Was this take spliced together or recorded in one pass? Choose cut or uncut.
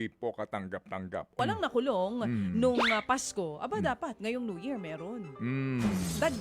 cut